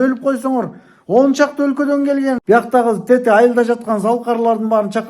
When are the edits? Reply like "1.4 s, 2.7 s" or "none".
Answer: 2.4 s

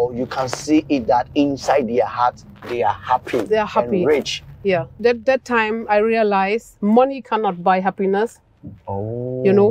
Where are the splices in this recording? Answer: none

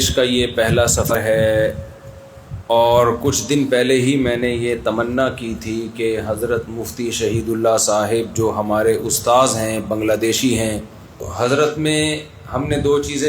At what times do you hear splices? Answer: 1.1 s, 11.3 s

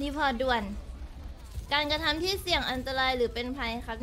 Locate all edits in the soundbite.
none

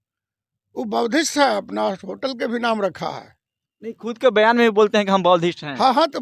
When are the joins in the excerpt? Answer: none

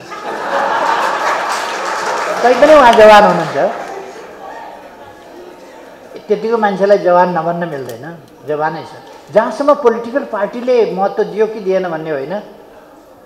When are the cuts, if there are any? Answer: none

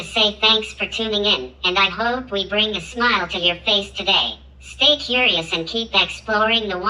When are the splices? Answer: none

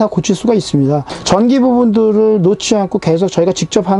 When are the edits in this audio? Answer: none

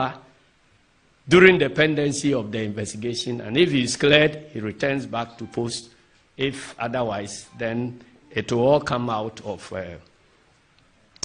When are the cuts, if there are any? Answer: none

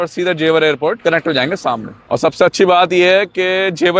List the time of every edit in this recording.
1.0 s, 1.9 s

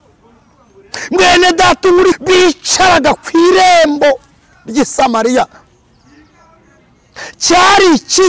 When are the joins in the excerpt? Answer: 2.2 s

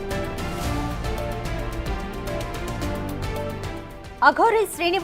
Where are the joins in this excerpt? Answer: 1.4 s

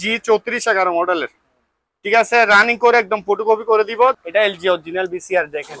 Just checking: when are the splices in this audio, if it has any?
4.2 s

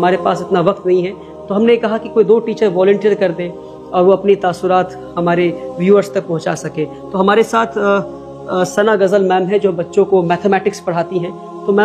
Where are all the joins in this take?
none

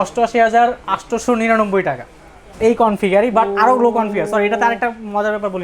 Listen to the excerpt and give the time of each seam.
none

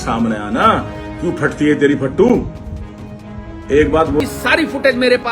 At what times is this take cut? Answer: 4.2 s

